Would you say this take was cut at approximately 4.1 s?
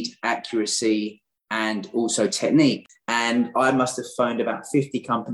no; 1 cut; at 2.9 s

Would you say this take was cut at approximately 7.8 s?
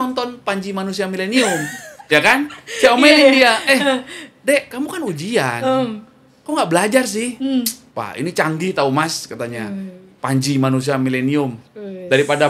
yes; 1 cut; at 7.8 s

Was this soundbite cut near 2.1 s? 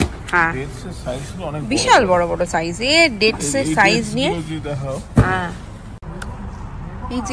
no; 1 cut; at 6.1 s

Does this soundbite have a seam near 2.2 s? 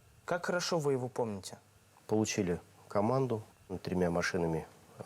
no; 1 cut; at 3.8 s

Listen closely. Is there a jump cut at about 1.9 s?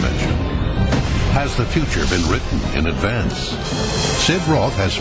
yes; 1 cut; at 1.9 s

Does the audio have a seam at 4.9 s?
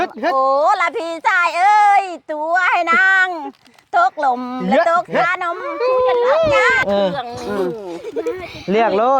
no; 1 cut; at 6.7 s

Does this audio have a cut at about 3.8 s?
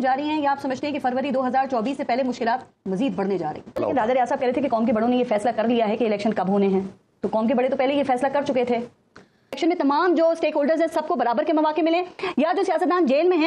yes; 2 cuts; at 3.8 s, 9.5 s

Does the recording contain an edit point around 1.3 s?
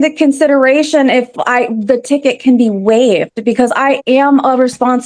no; 0 cuts

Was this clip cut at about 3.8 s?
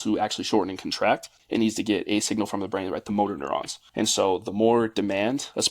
yes; 2 cuts; at 1.3 s, 3.8 s

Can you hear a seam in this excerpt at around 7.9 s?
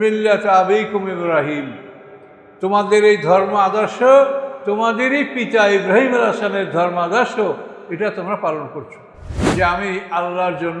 no; 1 cut; at 9.3 s

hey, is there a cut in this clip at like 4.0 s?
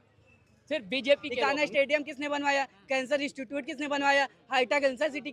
no; 1 cut; at 1.3 s

